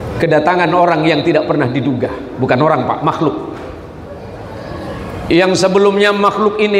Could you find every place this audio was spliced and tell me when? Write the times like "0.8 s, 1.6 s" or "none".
none